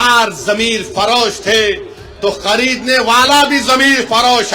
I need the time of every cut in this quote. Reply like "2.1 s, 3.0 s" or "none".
none